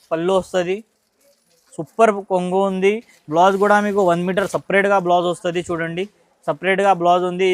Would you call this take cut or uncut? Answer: uncut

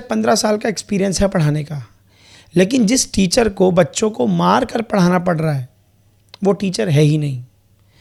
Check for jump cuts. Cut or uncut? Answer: uncut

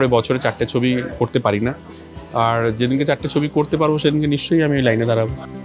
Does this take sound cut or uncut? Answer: uncut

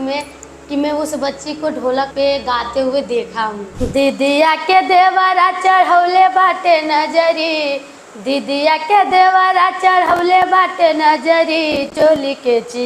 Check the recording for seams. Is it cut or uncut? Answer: cut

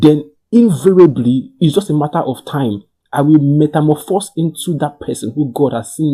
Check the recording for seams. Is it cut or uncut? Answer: uncut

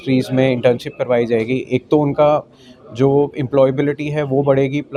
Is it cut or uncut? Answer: uncut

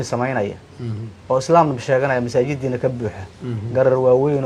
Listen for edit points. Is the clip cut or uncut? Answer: uncut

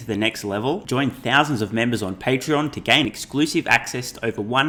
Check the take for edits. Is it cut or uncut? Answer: uncut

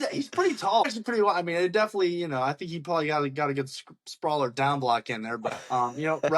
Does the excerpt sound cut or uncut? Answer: cut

